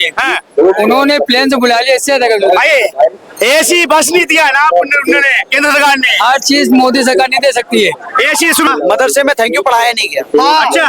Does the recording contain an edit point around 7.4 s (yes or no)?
no